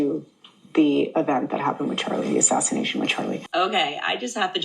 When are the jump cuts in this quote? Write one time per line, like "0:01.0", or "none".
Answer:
0:03.4